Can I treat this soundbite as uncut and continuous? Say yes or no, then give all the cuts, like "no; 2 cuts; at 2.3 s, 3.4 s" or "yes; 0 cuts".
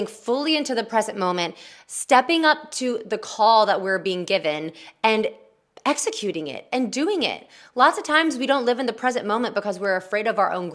yes; 0 cuts